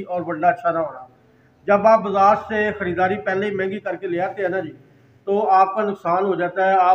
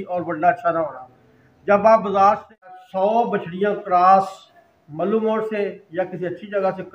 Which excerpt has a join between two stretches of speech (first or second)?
second